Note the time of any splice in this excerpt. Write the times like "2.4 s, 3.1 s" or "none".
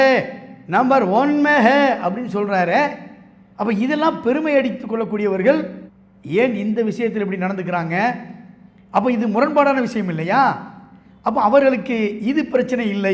none